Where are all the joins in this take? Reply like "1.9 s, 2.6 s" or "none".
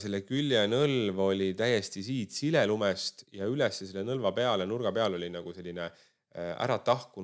none